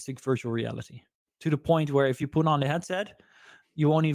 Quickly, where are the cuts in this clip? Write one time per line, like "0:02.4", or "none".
0:02.1